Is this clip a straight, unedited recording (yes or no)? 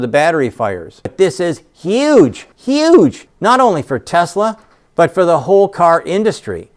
no